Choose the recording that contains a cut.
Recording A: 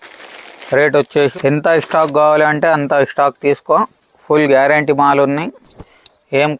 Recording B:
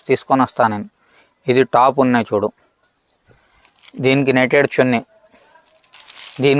A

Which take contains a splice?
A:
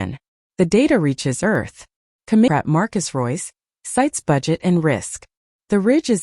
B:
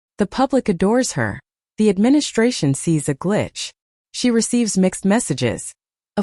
A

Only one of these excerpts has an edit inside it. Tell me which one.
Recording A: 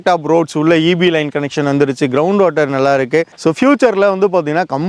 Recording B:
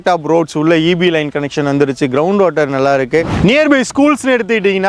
B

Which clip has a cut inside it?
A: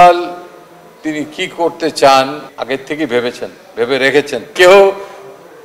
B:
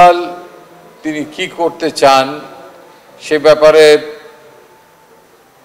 A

